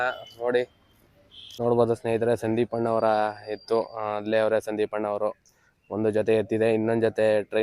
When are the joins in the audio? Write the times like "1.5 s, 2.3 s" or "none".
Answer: 1.4 s